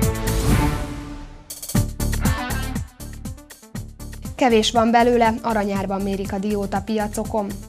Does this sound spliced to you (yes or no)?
yes